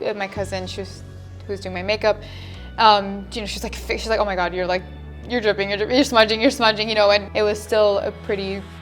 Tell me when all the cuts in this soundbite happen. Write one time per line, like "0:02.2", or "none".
0:07.3